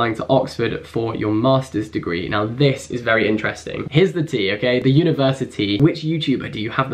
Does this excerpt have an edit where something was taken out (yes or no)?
yes